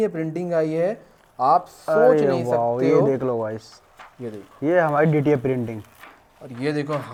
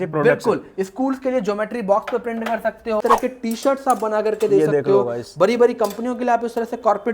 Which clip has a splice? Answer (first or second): second